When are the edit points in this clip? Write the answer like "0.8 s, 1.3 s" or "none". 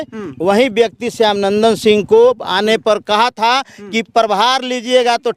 none